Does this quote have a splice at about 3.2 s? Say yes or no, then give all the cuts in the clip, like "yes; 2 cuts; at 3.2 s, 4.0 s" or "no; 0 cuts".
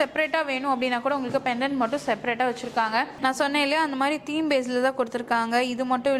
yes; 1 cut; at 3.2 s